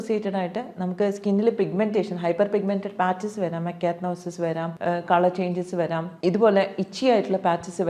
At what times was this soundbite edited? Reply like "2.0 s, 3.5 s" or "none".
4.7 s, 6.1 s